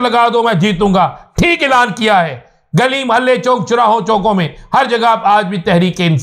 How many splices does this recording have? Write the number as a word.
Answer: zero